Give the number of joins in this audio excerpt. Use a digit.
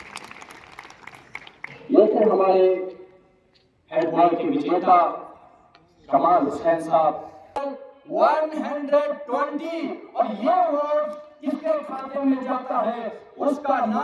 1